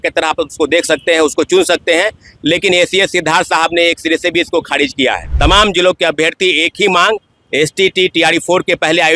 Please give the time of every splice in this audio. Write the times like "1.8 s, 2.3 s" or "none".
5.2 s